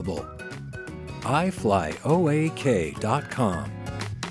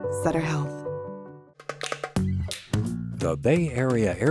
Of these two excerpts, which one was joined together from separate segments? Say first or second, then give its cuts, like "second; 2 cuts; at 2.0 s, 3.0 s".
second; 1 cut; at 1.4 s